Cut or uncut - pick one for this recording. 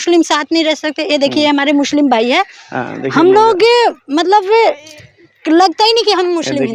uncut